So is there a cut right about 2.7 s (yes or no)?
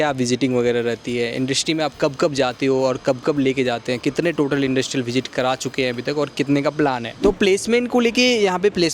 no